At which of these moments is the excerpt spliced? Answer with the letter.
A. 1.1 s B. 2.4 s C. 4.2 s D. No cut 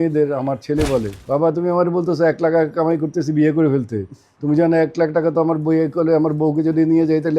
A